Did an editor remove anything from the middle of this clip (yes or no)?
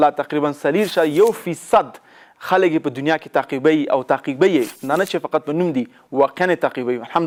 no